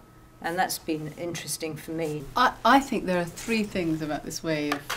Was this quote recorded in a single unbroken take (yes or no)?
no